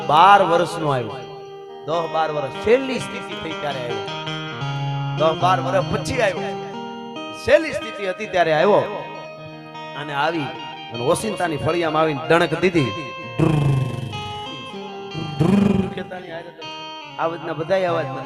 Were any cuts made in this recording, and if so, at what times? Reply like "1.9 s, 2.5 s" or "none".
none